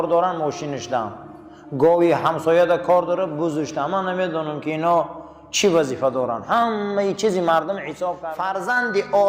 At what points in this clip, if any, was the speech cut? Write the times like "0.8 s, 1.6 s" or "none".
8.1 s